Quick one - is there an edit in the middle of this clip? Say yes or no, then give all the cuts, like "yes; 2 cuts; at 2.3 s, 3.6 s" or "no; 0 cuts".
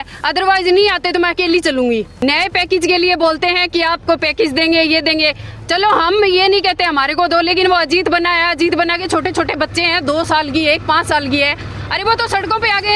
yes; 1 cut; at 2.1 s